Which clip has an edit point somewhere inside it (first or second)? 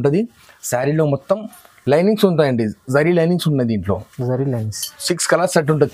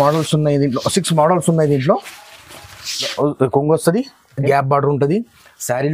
second